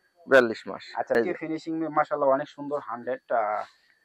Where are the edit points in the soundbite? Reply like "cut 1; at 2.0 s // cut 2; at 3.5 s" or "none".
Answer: cut 1; at 1.1 s